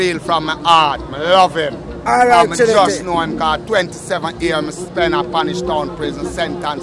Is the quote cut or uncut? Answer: uncut